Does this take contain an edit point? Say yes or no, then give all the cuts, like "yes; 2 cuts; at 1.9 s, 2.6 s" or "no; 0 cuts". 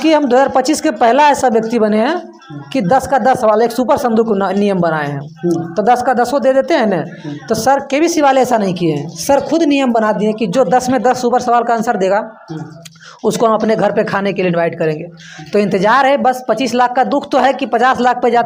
no; 0 cuts